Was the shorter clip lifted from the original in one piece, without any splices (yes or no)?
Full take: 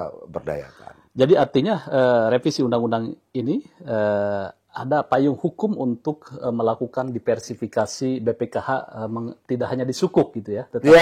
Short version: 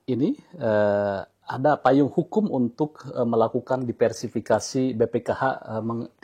yes